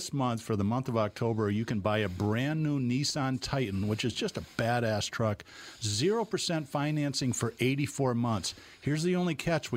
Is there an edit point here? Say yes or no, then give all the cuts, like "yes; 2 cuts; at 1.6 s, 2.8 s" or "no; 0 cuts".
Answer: no; 0 cuts